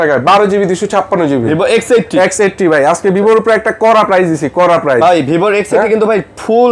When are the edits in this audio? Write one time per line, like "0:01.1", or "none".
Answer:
none